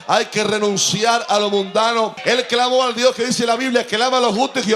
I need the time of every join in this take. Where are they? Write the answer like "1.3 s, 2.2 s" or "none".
2.2 s

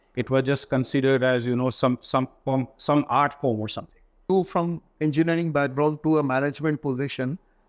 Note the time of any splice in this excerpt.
4.3 s

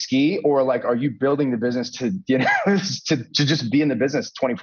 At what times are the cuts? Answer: none

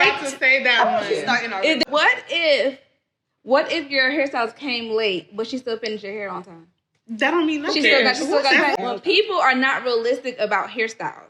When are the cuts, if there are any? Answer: 1.8 s, 8.8 s

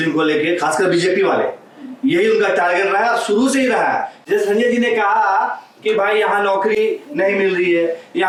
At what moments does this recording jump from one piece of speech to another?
none

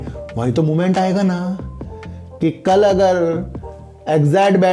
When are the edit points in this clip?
none

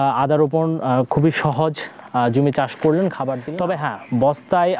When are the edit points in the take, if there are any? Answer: 3.3 s

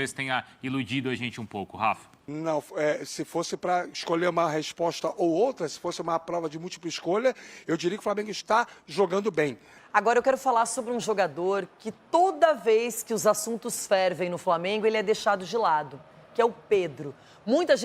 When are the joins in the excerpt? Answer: 9.7 s

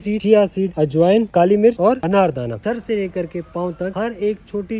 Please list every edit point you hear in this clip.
1.3 s, 2.6 s

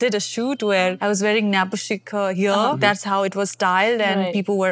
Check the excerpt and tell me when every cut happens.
none

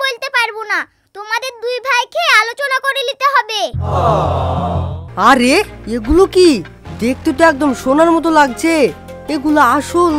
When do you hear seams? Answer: 5.0 s

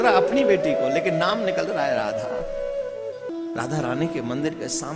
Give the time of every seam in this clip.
3.3 s

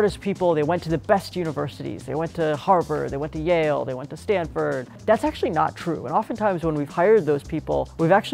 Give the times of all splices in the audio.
none

